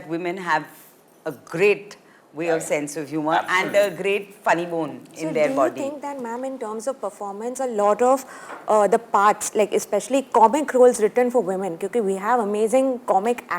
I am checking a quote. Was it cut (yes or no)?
no